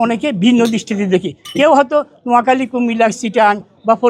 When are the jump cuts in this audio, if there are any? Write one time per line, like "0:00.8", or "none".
none